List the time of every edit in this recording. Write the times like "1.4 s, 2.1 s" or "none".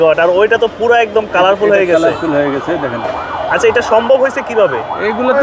none